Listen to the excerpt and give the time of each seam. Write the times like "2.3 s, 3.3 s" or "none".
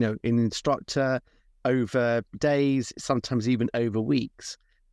2.3 s